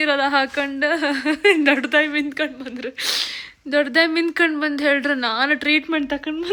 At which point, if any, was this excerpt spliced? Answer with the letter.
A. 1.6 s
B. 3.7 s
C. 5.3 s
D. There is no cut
D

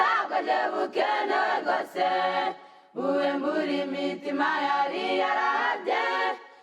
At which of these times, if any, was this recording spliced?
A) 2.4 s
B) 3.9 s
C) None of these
A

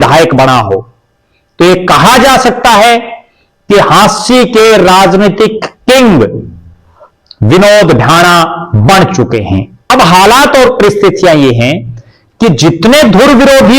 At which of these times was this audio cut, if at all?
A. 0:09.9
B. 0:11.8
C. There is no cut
A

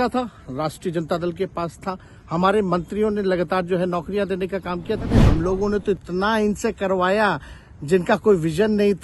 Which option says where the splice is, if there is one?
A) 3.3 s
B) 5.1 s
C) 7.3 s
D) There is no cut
B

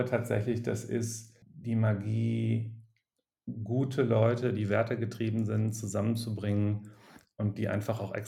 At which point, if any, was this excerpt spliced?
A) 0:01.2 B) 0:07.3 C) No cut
A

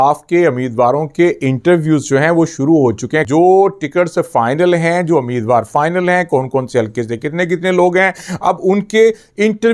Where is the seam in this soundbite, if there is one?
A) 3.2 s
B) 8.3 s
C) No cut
A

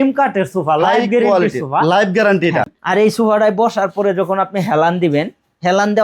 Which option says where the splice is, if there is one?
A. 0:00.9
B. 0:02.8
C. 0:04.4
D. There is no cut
B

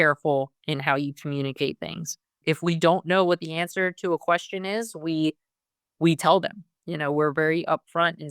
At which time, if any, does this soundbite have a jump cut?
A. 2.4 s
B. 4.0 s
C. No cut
A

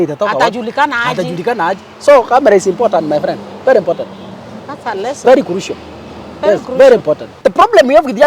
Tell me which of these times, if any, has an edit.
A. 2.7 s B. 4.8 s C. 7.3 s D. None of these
C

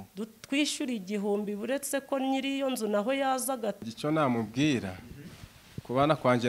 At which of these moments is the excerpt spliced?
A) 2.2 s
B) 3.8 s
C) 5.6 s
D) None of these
B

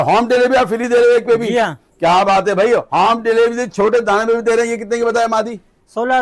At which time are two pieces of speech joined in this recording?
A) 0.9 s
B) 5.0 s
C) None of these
C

